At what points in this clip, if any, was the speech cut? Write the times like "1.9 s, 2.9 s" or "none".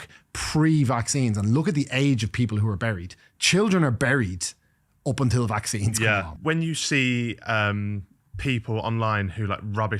6.3 s